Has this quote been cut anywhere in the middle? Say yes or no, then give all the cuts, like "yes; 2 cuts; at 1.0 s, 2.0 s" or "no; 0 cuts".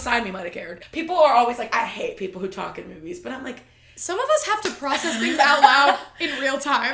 no; 0 cuts